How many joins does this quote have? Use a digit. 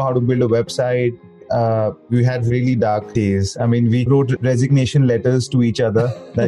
3